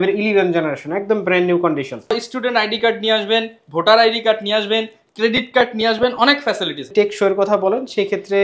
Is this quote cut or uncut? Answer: cut